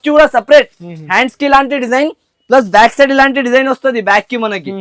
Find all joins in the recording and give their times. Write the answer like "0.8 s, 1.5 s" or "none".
none